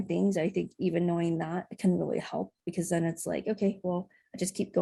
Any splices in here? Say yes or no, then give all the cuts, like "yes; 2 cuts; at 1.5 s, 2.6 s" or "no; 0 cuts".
no; 0 cuts